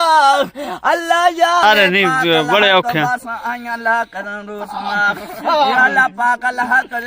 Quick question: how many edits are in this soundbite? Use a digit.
1